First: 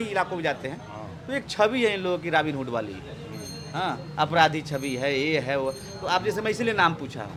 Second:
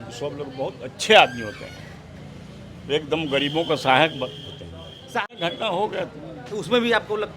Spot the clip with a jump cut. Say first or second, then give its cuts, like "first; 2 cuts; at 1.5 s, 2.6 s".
second; 1 cut; at 5.0 s